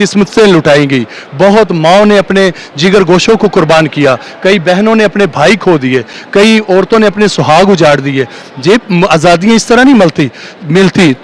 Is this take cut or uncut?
uncut